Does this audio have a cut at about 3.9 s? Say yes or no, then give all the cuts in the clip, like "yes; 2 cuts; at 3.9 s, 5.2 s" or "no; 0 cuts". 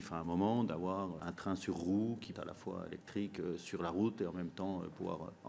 no; 2 cuts; at 1.2 s, 2.3 s